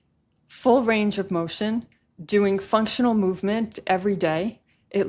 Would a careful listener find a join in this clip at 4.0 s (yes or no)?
no